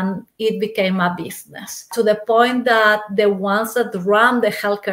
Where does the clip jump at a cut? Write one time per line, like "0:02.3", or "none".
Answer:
0:01.9

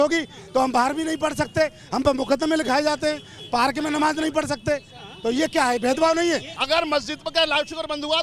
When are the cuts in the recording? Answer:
0:06.6

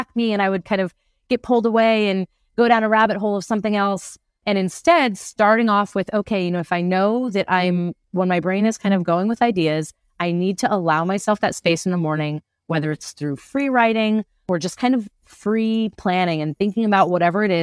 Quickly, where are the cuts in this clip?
none

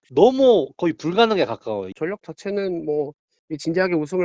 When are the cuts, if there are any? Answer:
0:01.9

